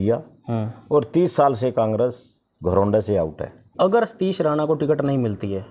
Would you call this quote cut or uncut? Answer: cut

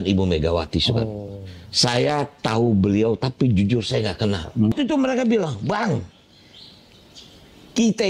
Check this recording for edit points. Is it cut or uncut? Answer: cut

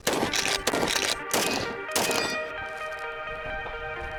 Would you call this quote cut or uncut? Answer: uncut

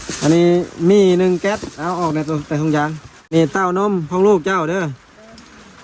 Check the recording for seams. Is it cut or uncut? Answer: cut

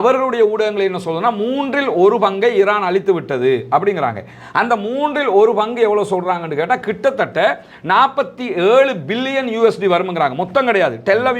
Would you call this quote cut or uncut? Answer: uncut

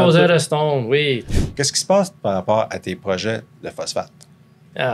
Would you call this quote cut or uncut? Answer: cut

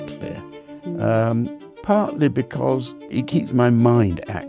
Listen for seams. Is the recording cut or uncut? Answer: cut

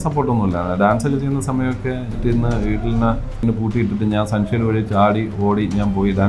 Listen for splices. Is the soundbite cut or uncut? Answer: cut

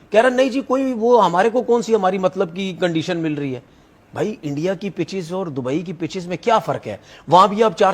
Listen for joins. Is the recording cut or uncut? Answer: uncut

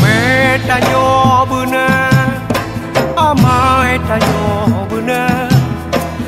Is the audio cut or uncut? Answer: uncut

